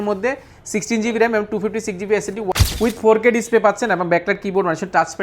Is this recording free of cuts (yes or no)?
no